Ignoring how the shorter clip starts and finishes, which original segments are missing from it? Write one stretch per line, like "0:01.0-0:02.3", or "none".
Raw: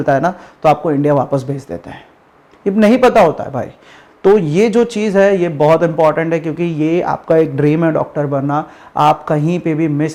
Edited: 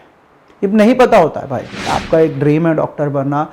0:04.0-0:07.1